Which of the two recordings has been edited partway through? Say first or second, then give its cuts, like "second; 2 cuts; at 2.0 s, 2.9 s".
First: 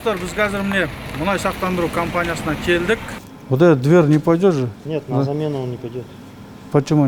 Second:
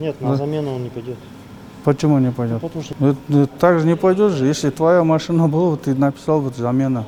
first; 1 cut; at 3.3 s